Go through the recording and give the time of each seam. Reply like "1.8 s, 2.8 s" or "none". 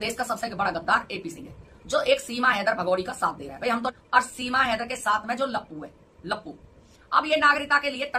3.9 s, 6.8 s